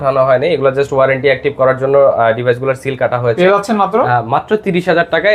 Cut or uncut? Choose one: uncut